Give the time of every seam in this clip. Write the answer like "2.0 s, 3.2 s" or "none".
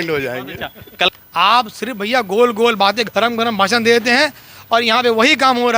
1.1 s